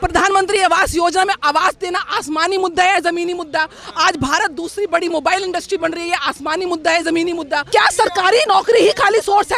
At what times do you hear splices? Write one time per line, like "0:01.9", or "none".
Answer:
0:07.7